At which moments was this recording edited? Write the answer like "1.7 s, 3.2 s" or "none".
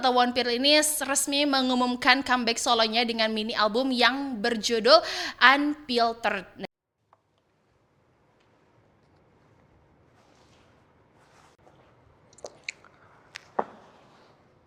none